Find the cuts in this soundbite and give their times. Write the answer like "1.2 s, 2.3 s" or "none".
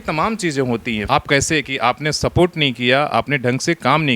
none